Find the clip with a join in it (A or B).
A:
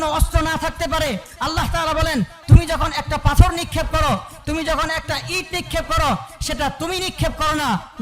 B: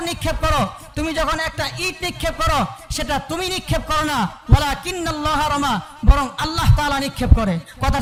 A